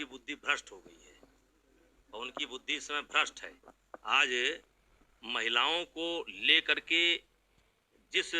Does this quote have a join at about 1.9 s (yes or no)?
no